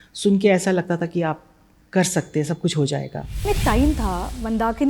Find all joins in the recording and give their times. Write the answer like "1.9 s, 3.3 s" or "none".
3.5 s